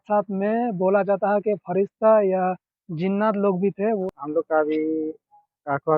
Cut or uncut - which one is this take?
cut